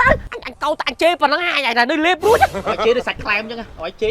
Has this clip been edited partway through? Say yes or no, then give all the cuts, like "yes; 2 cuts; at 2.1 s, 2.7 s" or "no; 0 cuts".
no; 0 cuts